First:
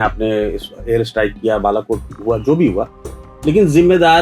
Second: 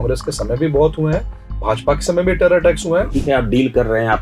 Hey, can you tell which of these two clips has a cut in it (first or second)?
second